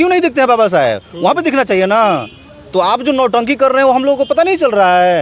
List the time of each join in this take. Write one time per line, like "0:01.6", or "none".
none